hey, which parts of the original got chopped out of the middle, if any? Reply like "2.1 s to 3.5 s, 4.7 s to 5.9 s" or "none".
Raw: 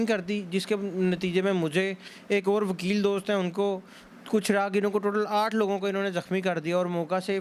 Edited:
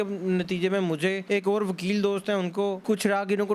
1.9 s to 2.2 s, 3.8 s to 4.2 s